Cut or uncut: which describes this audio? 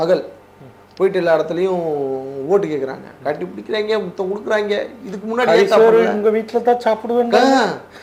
uncut